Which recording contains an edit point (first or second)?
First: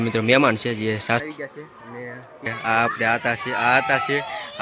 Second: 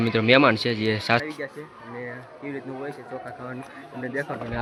first